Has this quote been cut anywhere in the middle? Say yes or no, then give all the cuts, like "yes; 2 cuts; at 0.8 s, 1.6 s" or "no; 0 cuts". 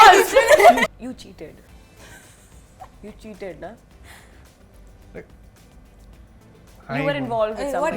yes; 1 cut; at 0.9 s